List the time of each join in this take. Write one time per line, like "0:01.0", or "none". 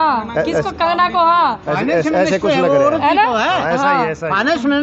none